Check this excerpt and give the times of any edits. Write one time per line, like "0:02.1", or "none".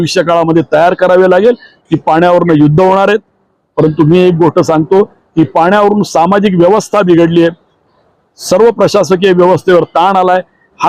0:01.7